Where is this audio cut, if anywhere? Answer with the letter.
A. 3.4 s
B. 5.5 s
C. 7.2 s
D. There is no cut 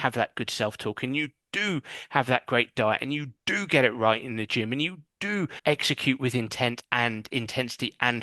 B